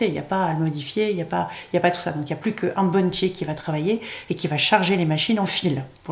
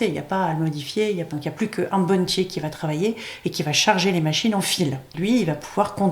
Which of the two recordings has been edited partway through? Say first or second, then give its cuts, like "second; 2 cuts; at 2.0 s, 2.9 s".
second; 2 cuts; at 1.3 s, 5.1 s